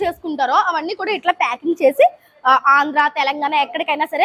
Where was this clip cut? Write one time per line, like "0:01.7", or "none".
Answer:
none